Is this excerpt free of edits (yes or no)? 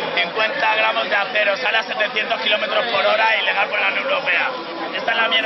yes